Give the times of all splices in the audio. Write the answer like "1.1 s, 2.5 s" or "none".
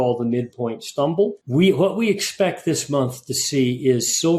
1.4 s

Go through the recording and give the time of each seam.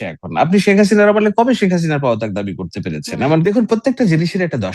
3.4 s

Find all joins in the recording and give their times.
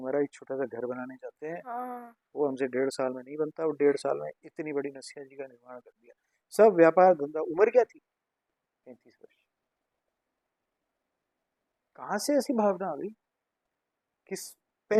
none

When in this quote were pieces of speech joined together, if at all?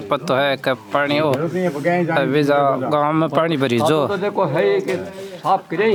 none

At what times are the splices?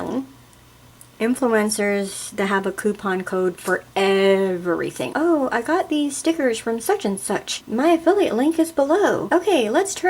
5.1 s, 7.5 s, 9.2 s

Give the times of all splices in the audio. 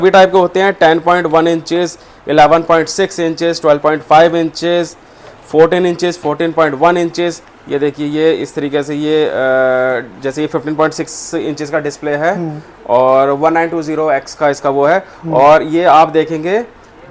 none

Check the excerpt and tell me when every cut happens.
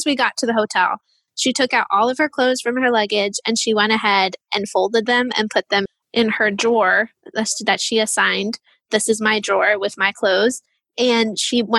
none

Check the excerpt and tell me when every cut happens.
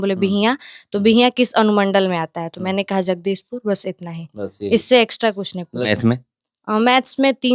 5.8 s

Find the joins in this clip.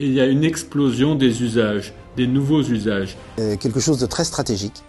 3.3 s

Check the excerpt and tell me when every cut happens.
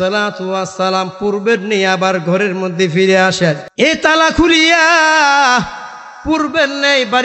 3.7 s

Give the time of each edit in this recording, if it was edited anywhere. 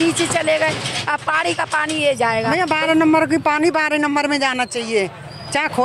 2.5 s

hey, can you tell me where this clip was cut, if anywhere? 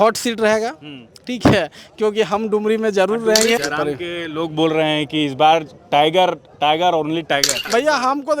3.6 s, 7.6 s

